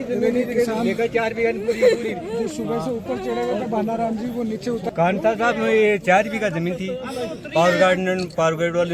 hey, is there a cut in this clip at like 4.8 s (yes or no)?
yes